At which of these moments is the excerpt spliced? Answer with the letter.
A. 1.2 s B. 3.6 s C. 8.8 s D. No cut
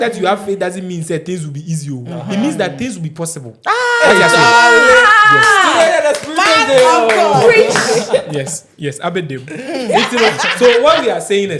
D